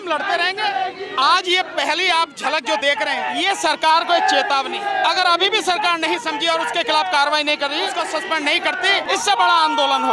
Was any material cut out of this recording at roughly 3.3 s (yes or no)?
yes